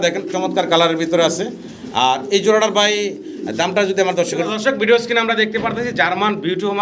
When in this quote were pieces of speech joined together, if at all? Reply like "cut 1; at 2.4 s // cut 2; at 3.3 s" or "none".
cut 1; at 4.5 s